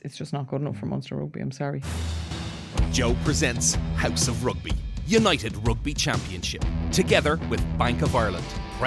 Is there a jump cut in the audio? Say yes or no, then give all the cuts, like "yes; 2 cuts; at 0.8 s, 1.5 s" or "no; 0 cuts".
yes; 1 cut; at 1.8 s